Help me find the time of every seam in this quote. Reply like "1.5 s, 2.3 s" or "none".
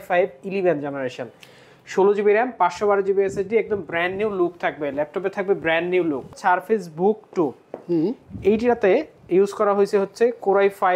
6.3 s

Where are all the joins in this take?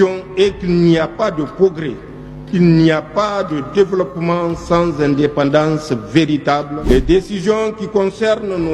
6.7 s

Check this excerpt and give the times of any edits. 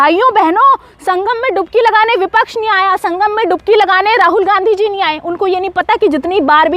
none

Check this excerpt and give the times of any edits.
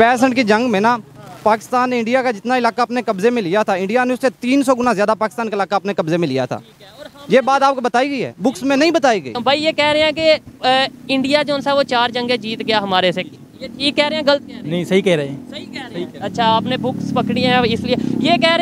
9.3 s

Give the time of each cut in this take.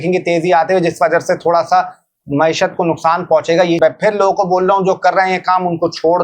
3.8 s

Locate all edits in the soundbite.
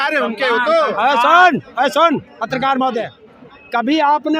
3.2 s

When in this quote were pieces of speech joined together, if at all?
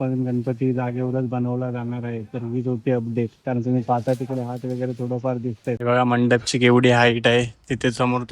5.8 s

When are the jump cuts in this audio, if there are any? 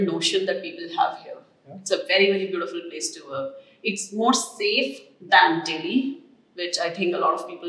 none

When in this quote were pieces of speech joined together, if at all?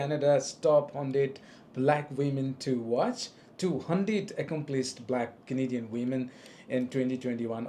none

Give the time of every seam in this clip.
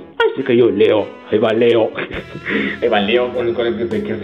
none

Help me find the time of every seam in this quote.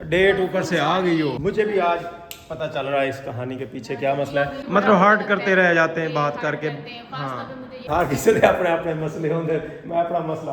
1.4 s, 4.6 s, 7.9 s

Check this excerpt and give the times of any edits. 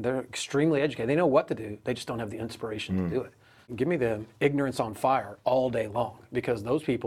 3.7 s

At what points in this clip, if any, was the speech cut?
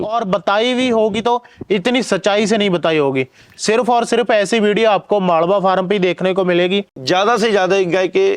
7.0 s

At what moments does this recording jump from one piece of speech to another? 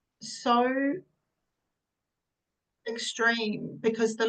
none

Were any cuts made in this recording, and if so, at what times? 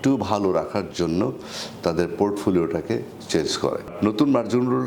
3.9 s

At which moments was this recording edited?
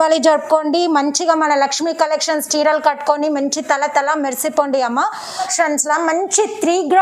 5.4 s

